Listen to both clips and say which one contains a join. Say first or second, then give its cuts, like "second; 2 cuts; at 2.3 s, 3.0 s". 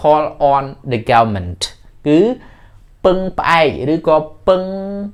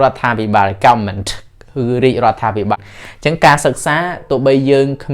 second; 1 cut; at 2.8 s